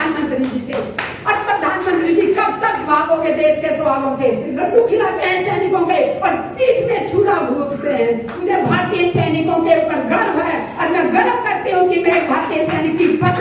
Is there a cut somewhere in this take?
yes; 2 cuts; at 4.6 s, 8.5 s

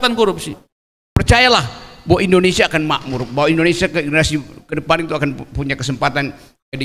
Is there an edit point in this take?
yes; 1 cut; at 1.1 s

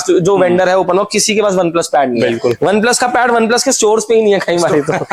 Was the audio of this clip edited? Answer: no; 0 cuts

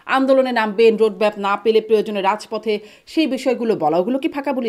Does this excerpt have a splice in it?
no; 0 cuts

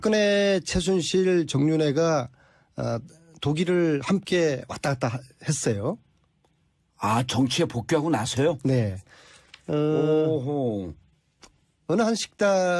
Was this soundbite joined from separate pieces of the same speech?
yes; 1 cut; at 8.4 s

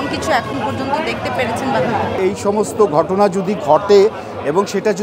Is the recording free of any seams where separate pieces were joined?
no; 1 cut; at 2.2 s

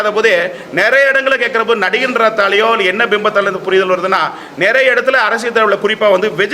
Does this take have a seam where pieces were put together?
no; 0 cuts

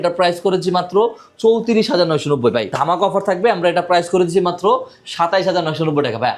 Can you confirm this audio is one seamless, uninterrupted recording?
no; 1 cut; at 2.7 s

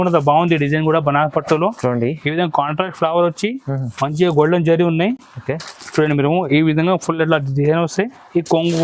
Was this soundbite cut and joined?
no; 0 cuts

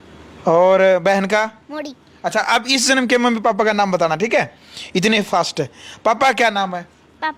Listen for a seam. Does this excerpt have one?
no; 0 cuts

